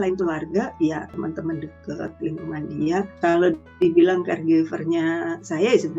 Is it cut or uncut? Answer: cut